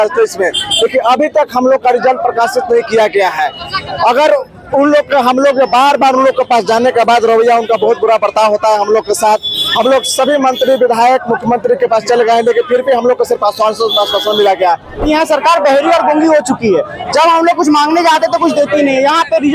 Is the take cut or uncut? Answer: cut